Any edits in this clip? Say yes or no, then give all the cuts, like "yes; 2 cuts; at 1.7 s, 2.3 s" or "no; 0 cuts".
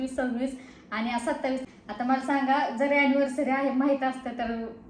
yes; 1 cut; at 1.6 s